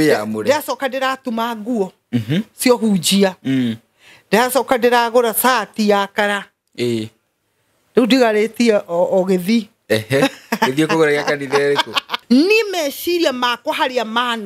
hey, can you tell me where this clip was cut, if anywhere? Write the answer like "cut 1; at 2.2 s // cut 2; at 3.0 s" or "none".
cut 1; at 12.2 s